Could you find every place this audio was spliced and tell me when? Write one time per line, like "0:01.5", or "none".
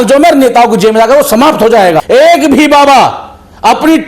0:02.0